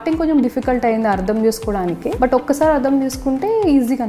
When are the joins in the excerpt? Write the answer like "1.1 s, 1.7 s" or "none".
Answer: 2.1 s